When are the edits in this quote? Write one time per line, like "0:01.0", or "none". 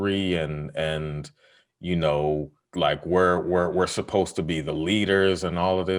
0:02.6